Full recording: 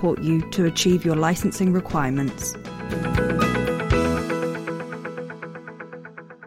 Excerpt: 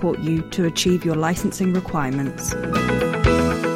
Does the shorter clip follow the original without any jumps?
no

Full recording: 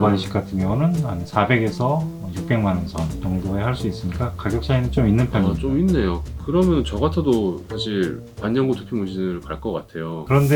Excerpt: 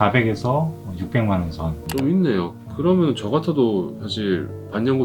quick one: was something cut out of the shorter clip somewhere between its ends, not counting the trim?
yes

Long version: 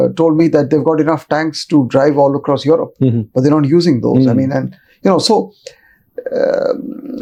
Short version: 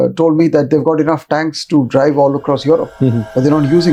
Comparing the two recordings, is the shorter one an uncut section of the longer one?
yes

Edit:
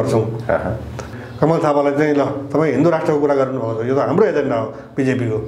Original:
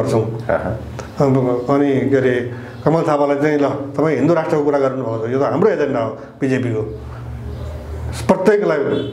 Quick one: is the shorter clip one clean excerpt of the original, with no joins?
no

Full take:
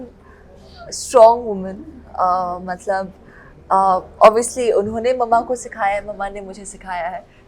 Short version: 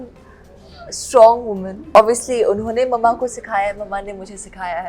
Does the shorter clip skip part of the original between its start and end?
yes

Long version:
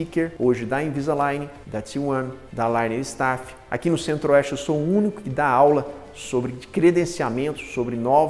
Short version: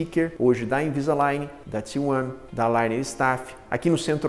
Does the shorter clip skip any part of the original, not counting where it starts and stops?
no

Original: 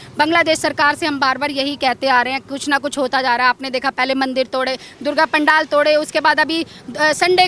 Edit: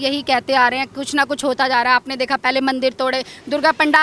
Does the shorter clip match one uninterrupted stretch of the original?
yes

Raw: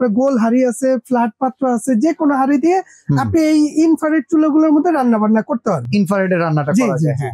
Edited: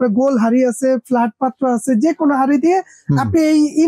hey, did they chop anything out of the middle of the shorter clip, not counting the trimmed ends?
no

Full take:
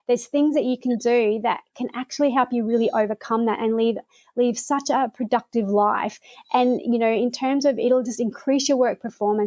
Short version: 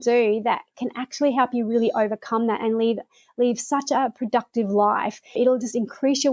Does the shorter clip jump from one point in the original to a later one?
yes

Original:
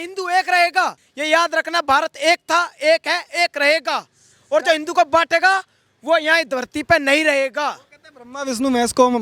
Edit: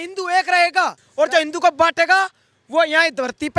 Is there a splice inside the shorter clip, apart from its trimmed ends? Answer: yes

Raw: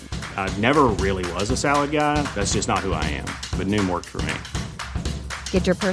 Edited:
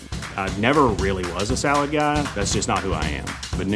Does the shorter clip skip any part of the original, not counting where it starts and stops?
no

